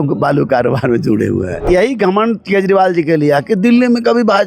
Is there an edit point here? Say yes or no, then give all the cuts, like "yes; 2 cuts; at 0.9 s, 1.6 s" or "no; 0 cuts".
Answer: yes; 1 cut; at 1.7 s